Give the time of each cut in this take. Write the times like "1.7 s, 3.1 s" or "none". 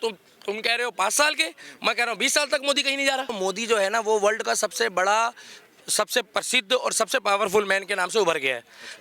3.4 s